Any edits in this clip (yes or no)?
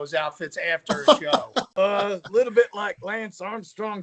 yes